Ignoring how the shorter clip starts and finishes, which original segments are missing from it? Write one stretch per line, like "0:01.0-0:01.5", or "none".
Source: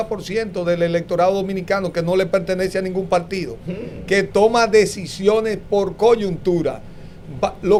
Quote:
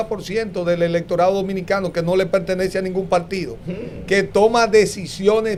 none